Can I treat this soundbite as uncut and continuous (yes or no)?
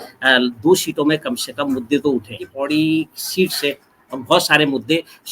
no